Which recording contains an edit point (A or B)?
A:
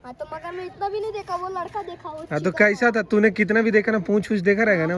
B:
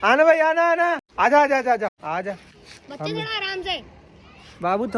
B